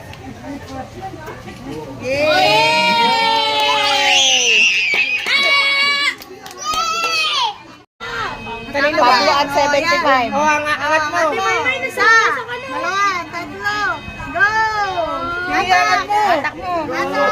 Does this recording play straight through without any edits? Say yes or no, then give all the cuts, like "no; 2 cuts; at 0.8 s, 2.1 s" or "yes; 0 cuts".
no; 1 cut; at 7.9 s